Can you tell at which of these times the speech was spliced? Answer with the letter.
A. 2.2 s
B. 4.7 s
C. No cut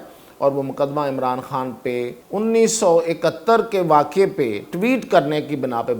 A